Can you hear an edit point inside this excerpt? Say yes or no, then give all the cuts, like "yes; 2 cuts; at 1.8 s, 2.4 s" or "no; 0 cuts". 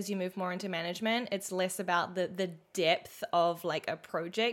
no; 0 cuts